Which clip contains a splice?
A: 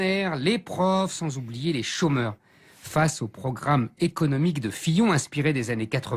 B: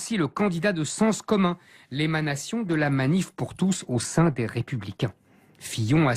A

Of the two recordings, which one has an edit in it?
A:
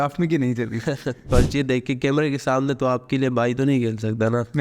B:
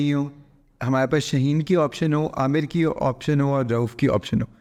A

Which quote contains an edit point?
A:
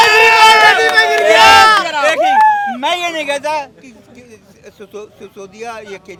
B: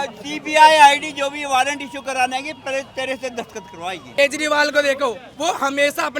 B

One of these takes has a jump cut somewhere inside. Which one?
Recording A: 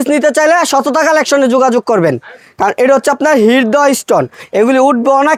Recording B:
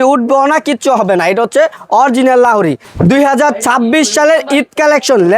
B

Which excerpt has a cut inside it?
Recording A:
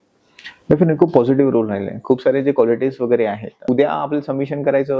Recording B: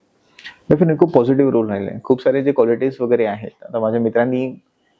A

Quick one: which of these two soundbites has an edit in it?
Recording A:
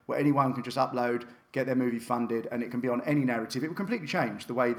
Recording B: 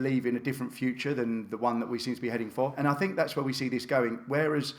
B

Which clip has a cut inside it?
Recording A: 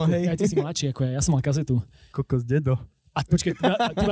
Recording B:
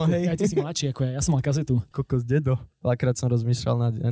B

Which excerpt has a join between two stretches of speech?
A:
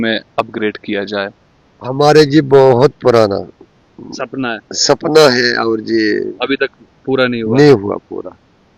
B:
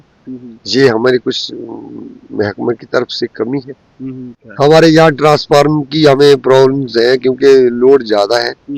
B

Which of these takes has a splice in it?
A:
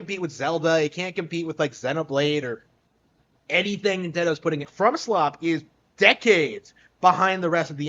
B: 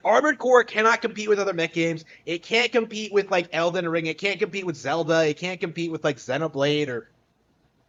A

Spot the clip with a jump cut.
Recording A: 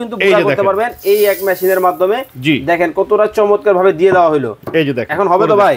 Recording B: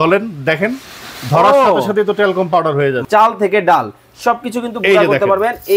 B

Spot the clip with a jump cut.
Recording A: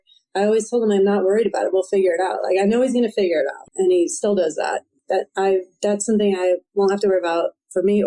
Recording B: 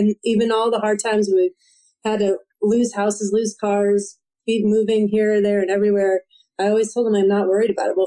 A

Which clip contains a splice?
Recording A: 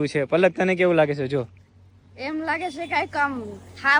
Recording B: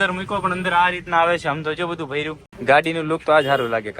B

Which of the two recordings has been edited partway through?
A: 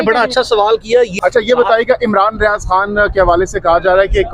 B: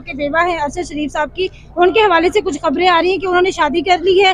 A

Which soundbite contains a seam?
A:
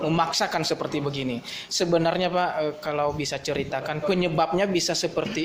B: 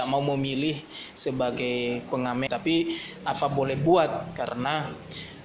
B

